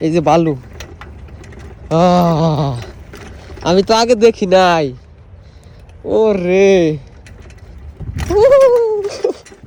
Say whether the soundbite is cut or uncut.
uncut